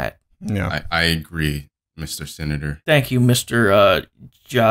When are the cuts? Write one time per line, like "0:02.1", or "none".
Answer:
none